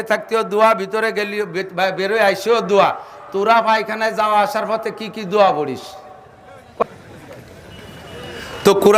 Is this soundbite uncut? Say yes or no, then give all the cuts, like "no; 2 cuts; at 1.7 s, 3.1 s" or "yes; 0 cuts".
no; 1 cut; at 6.8 s